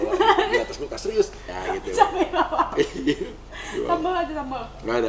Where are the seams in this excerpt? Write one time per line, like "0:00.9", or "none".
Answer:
0:01.5